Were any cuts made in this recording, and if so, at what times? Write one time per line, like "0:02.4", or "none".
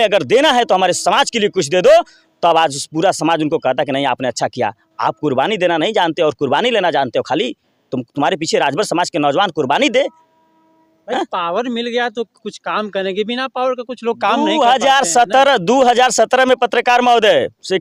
none